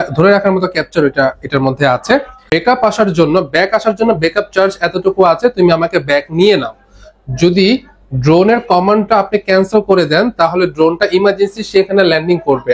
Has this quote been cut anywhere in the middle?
yes; 1 cut; at 2.3 s

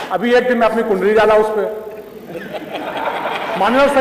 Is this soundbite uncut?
yes; 0 cuts

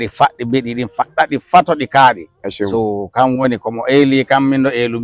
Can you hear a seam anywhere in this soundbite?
no; 0 cuts

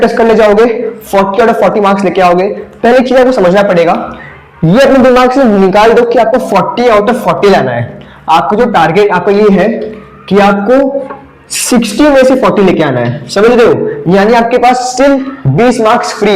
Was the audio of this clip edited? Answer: no; 0 cuts

